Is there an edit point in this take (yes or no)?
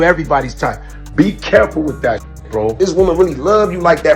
yes